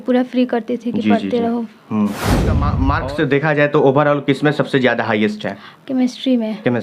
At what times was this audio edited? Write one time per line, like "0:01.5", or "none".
0:02.8